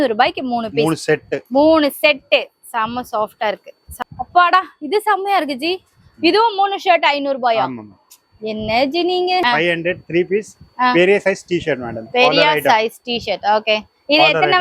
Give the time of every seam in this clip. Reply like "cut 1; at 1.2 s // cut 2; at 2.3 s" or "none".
cut 1; at 3.9 s // cut 2; at 9.4 s